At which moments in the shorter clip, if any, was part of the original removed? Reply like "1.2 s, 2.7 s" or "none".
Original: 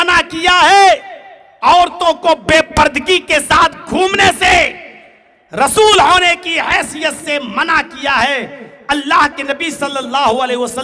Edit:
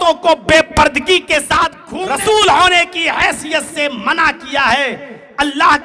1.9 s